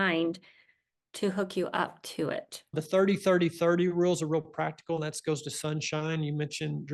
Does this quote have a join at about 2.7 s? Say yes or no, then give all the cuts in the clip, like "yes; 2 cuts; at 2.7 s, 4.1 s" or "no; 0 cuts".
yes; 1 cut; at 2.7 s